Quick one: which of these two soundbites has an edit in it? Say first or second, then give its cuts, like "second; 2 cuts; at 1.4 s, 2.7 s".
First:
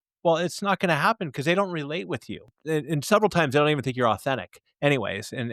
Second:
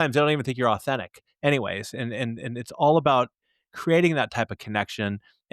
first; 1 cut; at 2.5 s